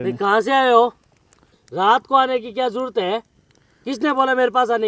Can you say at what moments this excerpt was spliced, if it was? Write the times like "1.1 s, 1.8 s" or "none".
1.6 s